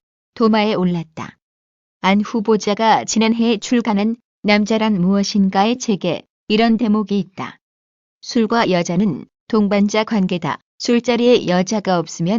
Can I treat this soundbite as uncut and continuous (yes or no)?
yes